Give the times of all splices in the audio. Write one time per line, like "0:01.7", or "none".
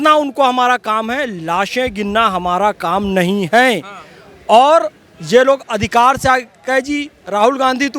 none

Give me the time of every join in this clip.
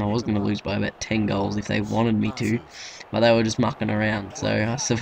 0:03.5

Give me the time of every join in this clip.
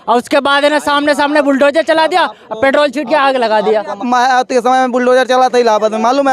0:04.0

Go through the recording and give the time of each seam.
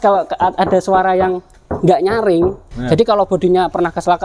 0:02.7

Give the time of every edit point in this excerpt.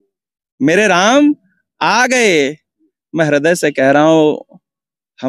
none

